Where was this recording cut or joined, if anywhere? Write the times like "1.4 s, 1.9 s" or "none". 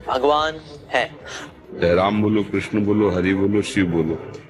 1.4 s